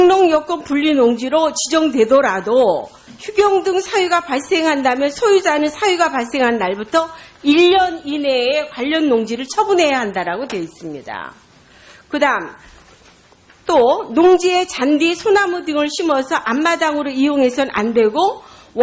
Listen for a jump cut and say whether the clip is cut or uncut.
cut